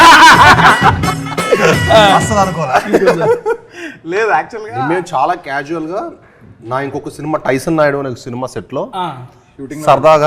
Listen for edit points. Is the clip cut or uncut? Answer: uncut